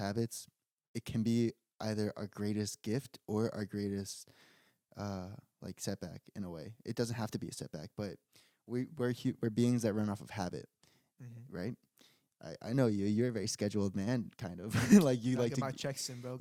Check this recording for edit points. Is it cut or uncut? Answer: uncut